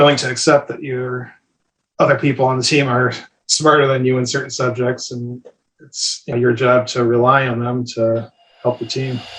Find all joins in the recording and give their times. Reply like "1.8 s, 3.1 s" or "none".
6.3 s, 8.4 s